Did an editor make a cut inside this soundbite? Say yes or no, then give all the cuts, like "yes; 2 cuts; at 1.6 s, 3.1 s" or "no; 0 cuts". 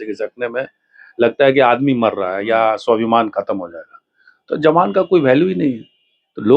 no; 0 cuts